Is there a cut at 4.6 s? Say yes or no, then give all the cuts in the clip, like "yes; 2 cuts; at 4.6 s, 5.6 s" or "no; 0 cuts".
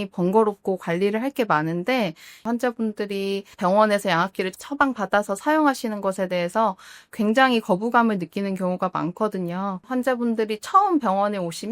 no; 2 cuts; at 2.4 s, 9.8 s